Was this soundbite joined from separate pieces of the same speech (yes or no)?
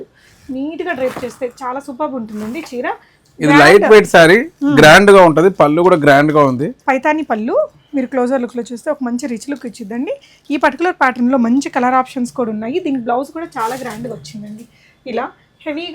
no